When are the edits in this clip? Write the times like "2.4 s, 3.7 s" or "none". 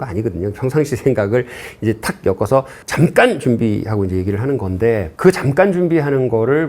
5.1 s